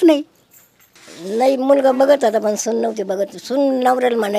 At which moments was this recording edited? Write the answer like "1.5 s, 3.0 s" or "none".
1.3 s